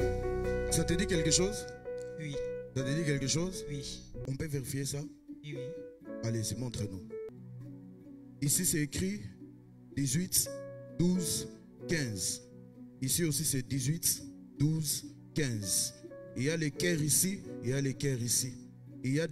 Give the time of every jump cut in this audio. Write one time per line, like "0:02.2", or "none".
0:04.2
0:07.3